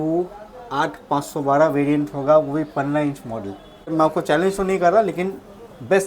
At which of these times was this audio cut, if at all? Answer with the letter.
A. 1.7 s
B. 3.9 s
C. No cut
B